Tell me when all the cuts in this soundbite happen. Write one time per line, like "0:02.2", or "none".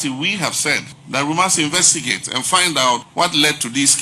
0:00.9
0:03.1